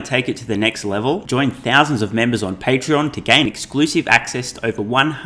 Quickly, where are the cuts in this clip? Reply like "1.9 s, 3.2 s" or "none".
none